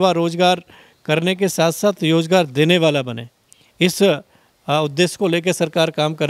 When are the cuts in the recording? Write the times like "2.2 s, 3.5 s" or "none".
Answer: none